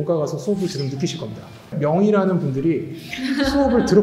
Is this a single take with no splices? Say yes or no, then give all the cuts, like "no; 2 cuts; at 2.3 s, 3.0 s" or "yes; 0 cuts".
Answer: yes; 0 cuts